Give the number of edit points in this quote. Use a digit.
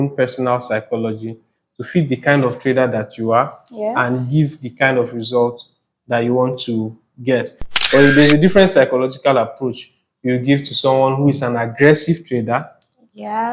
1